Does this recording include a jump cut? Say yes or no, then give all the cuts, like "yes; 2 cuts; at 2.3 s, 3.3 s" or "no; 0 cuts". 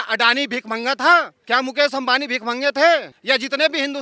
yes; 2 cuts; at 1.4 s, 3.1 s